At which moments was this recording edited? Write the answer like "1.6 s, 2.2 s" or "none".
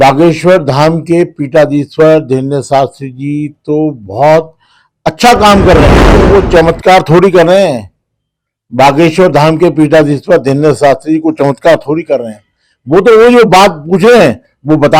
6.1 s